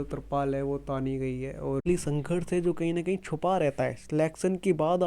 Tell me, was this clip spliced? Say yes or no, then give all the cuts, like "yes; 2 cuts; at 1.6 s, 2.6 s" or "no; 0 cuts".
yes; 1 cut; at 1.8 s